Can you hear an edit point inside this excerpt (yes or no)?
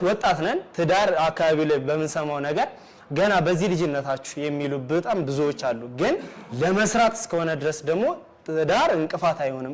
no